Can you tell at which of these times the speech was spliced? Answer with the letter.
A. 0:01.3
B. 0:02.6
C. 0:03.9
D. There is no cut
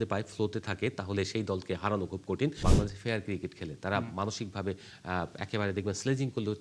B